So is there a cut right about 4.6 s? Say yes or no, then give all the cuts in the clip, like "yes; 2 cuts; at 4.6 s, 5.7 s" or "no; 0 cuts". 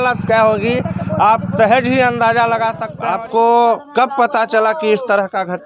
no; 1 cut; at 2.9 s